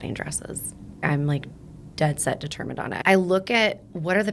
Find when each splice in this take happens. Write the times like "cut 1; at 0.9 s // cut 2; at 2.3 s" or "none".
cut 1; at 1.0 s // cut 2; at 2.9 s